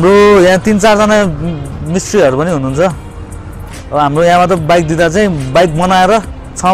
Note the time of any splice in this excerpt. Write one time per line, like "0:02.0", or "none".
none